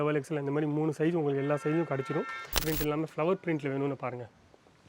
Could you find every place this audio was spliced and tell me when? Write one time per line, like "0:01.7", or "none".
0:02.7